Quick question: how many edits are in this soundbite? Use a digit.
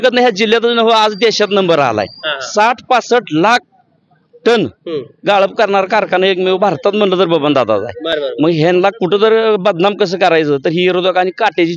0